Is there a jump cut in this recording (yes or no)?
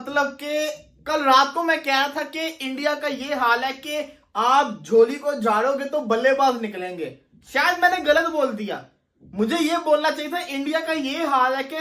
no